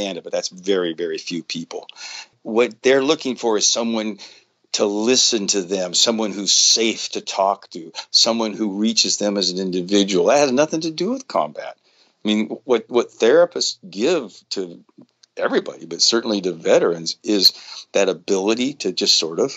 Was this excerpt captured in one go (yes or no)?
no